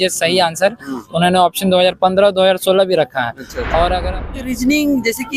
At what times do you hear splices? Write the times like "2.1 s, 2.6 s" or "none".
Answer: 4.3 s